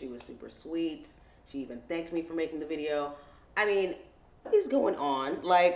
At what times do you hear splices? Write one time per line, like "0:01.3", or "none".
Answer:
0:04.5